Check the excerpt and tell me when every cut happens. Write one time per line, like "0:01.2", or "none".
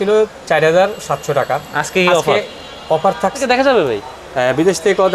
0:03.4